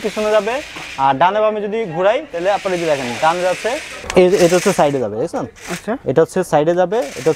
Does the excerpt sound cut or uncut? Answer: cut